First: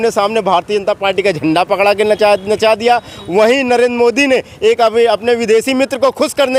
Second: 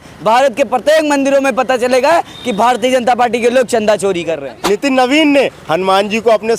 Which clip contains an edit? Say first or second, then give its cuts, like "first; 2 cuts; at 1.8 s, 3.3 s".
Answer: second; 1 cut; at 4.5 s